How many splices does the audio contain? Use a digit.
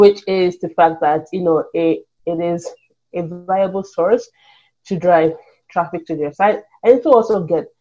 0